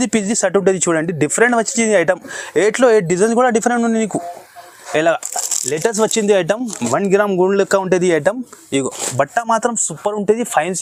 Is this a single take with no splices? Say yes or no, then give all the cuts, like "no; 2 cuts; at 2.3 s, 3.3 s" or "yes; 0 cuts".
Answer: yes; 0 cuts